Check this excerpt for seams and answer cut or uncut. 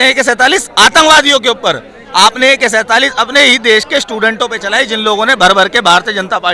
uncut